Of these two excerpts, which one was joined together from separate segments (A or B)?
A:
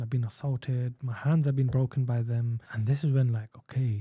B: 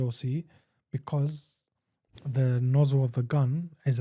A